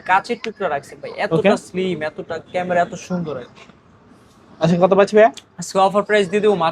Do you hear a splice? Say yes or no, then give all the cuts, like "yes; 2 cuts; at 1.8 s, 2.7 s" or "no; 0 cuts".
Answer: no; 0 cuts